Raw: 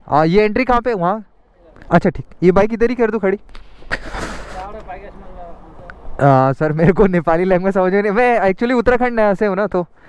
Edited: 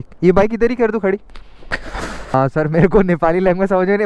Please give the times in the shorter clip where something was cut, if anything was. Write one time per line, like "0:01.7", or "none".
0:02.3